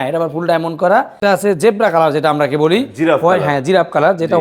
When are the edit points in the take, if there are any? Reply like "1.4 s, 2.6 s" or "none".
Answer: 1.2 s